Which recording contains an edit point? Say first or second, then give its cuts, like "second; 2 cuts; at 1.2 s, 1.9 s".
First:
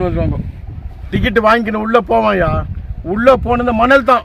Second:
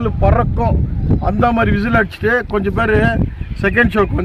first; 1 cut; at 1.0 s